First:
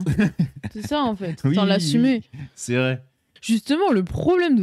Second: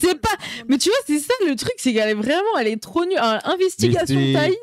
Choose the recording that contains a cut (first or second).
first